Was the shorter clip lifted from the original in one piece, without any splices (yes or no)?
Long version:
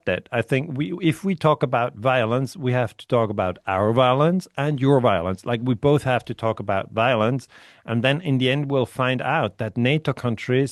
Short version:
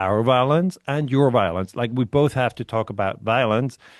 yes